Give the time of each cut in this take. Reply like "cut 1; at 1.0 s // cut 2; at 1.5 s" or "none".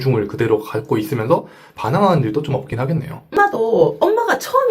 none